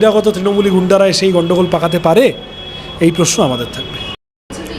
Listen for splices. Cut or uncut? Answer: uncut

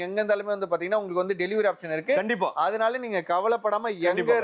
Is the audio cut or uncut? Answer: uncut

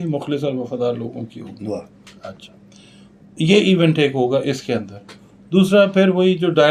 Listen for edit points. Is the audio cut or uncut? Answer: uncut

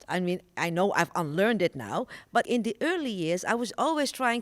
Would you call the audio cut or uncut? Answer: cut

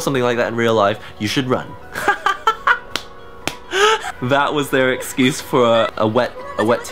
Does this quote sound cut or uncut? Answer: cut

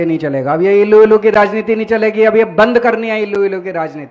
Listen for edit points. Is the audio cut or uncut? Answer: uncut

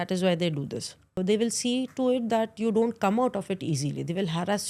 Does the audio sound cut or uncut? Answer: cut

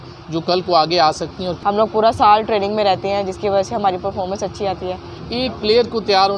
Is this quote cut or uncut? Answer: cut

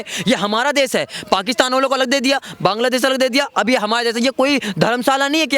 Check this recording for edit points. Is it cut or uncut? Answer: uncut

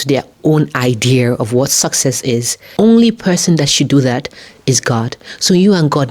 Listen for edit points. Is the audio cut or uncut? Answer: cut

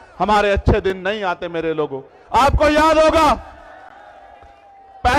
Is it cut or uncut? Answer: uncut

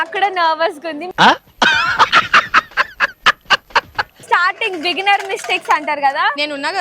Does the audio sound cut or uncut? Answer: cut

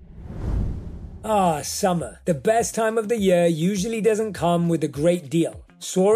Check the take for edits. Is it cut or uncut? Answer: cut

